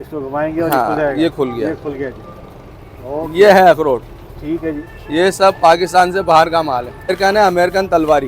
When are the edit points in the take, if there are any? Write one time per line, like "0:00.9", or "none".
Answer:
0:07.2